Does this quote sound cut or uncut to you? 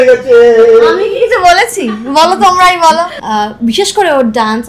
cut